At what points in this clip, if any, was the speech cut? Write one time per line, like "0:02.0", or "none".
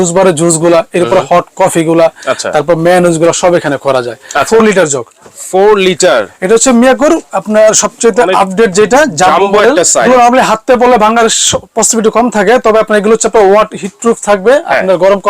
0:04.5
0:10.1